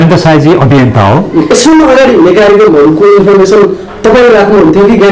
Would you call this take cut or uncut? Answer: uncut